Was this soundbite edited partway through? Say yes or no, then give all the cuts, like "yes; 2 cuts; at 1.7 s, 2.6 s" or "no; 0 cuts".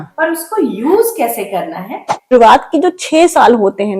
yes; 1 cut; at 2.2 s